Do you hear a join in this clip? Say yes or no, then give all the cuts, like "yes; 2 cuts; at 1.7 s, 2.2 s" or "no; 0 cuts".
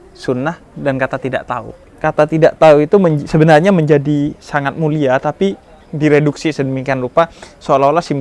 yes; 1 cut; at 1.8 s